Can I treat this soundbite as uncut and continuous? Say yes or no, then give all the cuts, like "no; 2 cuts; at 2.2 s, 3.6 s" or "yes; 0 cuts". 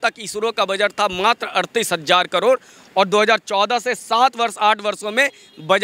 yes; 0 cuts